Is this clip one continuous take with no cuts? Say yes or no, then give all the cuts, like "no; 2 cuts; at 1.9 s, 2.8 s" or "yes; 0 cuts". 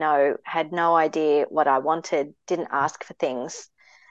yes; 0 cuts